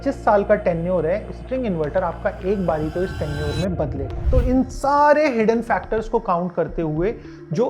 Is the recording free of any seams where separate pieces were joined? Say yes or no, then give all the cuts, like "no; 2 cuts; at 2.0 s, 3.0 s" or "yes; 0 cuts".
no; 1 cut; at 4.1 s